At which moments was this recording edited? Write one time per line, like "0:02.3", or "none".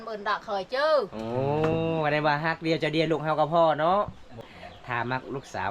0:04.4

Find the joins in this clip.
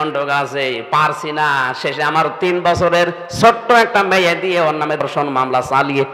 0:05.0

